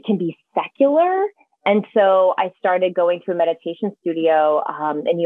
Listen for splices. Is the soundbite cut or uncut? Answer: uncut